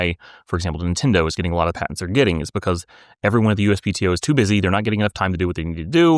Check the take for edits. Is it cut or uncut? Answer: uncut